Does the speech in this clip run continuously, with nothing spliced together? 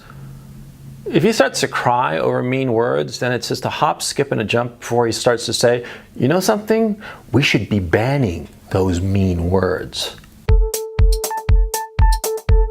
no; 1 cut; at 10.3 s

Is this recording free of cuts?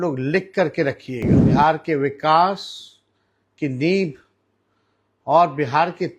no; 1 cut; at 1.4 s

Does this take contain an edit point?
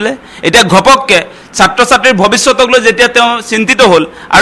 no; 0 cuts

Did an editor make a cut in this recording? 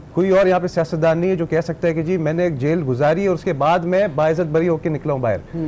no; 0 cuts

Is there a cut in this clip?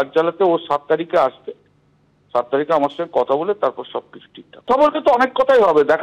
yes; 1 cut; at 4.7 s

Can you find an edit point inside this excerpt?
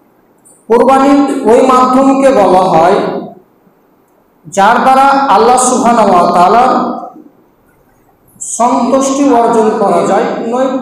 no; 0 cuts

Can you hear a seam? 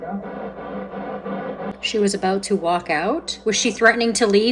yes; 1 cut; at 1.7 s

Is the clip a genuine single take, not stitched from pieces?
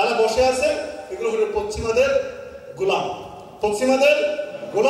yes; 0 cuts

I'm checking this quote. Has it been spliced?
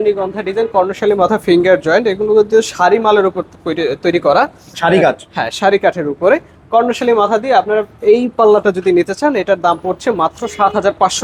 no; 0 cuts

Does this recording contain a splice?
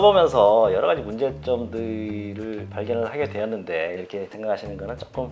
yes; 1 cut; at 4.0 s

